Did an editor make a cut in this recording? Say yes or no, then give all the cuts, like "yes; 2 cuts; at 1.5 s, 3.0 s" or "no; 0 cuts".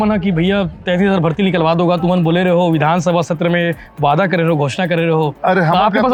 no; 0 cuts